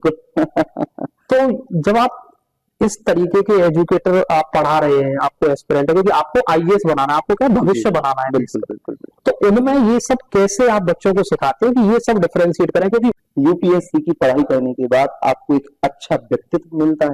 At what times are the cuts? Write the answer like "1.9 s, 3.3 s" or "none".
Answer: 13.2 s